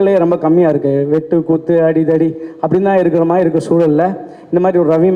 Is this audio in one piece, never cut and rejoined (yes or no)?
yes